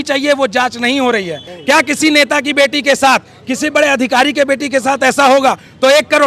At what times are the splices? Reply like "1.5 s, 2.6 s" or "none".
1.5 s